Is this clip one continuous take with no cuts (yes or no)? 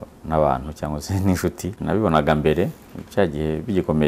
no